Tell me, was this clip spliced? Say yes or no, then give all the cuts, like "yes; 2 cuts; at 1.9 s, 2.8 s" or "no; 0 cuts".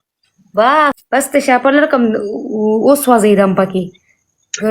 yes; 1 cut; at 1.0 s